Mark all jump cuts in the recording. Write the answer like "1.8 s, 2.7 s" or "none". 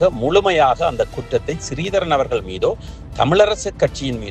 none